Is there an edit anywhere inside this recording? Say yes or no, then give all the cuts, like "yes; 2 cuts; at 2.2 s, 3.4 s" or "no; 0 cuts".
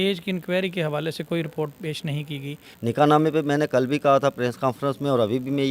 yes; 1 cut; at 2.7 s